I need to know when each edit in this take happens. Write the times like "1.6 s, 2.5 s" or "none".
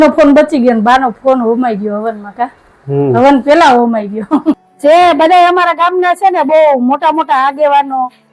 4.7 s